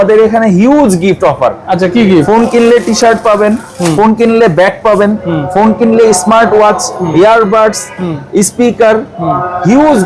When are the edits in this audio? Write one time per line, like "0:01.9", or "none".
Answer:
none